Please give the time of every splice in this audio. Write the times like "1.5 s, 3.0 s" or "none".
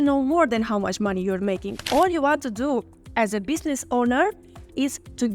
1.7 s